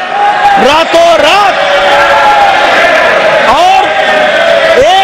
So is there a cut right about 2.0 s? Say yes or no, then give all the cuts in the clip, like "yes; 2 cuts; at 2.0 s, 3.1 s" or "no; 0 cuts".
no; 0 cuts